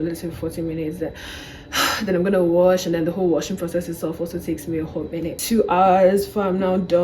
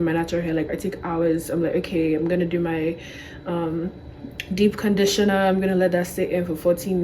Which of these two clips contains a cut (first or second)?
first